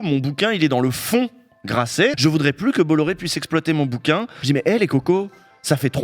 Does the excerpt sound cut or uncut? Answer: cut